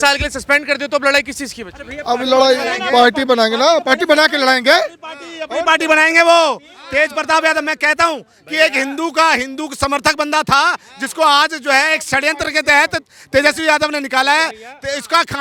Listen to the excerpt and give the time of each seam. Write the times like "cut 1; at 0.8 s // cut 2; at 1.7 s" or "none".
none

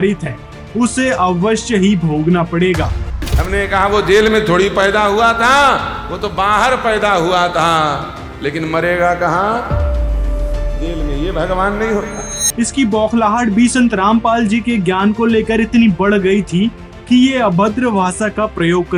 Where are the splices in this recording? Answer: cut 1; at 3.1 s

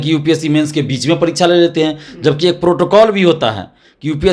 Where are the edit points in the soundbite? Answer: none

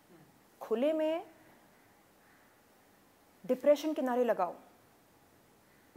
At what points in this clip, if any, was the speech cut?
none

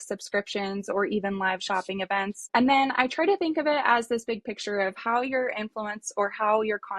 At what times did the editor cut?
cut 1; at 2.4 s

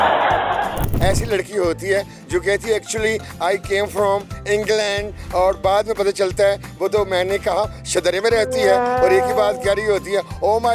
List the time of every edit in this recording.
cut 1; at 1.0 s

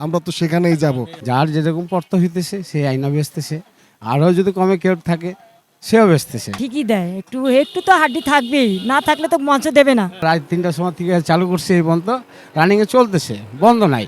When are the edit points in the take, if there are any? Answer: cut 1; at 1.1 s // cut 2; at 6.6 s // cut 3; at 10.2 s

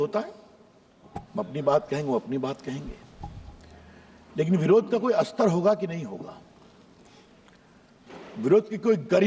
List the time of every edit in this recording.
none

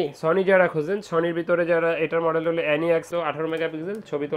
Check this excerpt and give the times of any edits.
cut 1; at 3.1 s

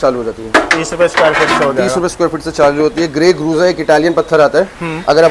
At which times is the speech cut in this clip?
none

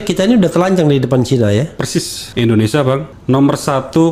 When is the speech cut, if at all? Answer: cut 1; at 2.2 s // cut 2; at 3.1 s

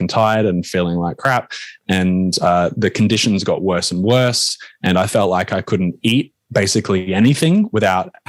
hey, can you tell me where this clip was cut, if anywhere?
none

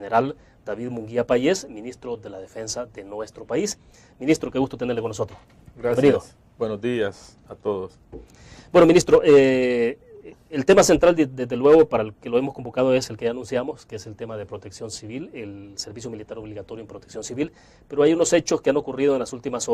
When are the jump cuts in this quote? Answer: cut 1; at 5.0 s

